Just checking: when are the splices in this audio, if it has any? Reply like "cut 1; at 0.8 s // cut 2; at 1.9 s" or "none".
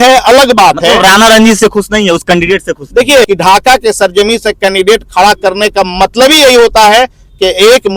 cut 1; at 3.3 s